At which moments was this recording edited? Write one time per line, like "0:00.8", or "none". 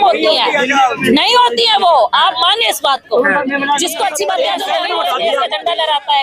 0:04.7